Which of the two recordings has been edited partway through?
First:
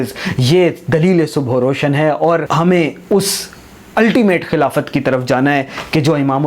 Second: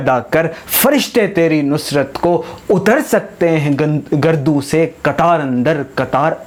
first; 1 cut; at 2.5 s

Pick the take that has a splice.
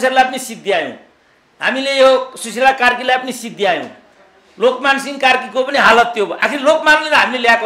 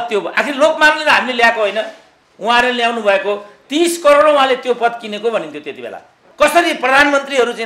second; 1 cut; at 6.2 s

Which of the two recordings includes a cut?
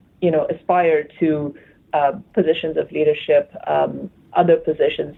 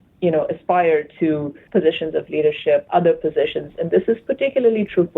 second; 2 cuts; at 1.6 s, 2.9 s

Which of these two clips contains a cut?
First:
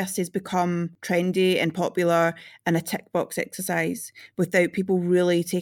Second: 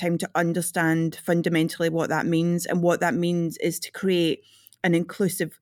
first; 1 cut; at 0.9 s

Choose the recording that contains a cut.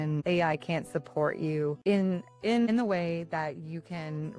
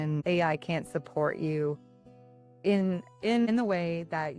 first; 1 cut; at 1.8 s

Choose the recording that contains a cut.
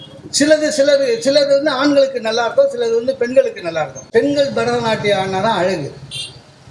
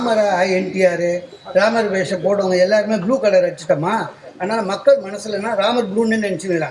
first; 1 cut; at 4.0 s

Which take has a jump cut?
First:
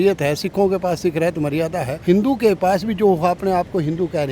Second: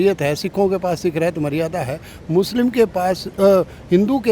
first; 1 cut; at 1.9 s

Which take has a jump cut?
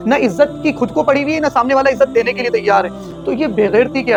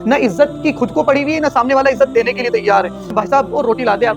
second; 1 cut; at 3.1 s

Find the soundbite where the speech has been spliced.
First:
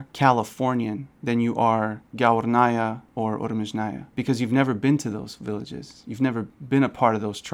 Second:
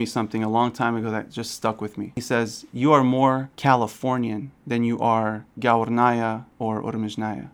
second; 1 cut; at 2.2 s

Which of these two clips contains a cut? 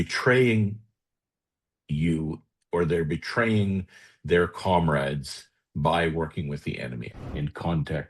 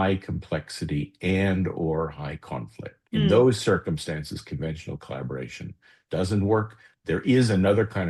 first; 1 cut; at 7.0 s

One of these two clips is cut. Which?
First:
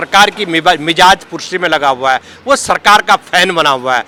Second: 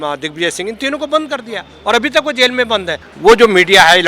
second; 1 cut; at 3.0 s

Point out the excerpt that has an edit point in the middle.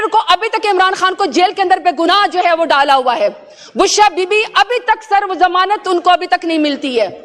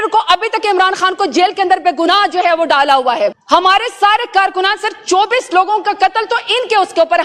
second; 1 cut; at 3.4 s

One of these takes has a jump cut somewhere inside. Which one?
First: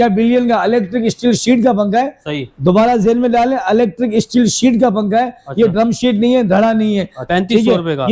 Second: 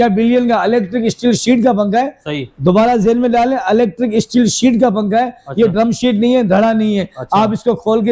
first; 1 cut; at 7.2 s

